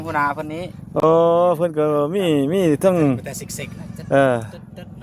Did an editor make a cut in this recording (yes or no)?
no